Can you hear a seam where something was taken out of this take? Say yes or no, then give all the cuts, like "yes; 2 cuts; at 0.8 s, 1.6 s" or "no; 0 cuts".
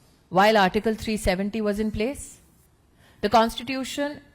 no; 0 cuts